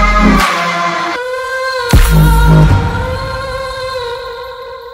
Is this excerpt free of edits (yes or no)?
yes